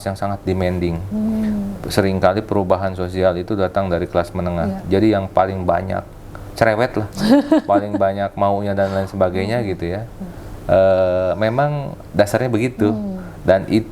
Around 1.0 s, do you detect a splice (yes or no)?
no